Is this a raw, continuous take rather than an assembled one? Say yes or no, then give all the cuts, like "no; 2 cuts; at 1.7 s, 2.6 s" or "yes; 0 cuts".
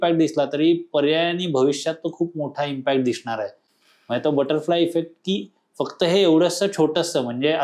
yes; 0 cuts